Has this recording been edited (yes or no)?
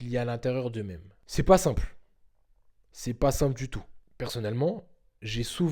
no